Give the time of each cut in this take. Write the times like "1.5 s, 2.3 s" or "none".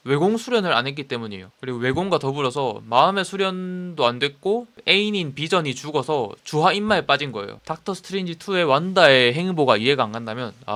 none

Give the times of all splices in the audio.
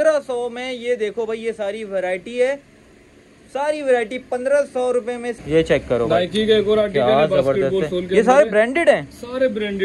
5.4 s

